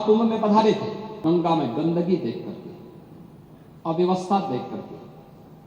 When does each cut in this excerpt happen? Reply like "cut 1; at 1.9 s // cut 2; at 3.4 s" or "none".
cut 1; at 1.2 s